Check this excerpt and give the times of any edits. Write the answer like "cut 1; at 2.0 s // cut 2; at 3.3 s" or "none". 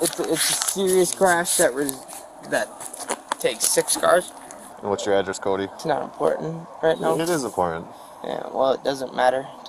cut 1; at 4.7 s // cut 2; at 5.8 s